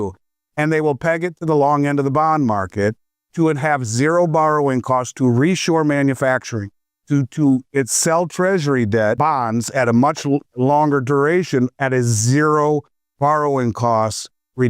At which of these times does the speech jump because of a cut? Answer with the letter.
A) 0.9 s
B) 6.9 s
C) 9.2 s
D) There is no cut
C